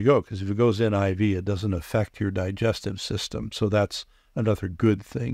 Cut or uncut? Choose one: uncut